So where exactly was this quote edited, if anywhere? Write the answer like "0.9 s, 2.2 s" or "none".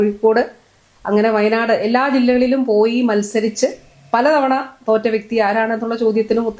none